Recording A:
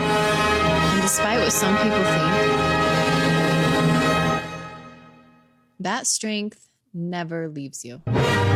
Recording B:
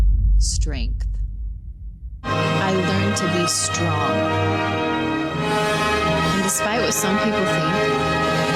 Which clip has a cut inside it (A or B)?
B